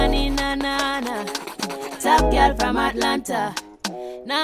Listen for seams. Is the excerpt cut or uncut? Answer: uncut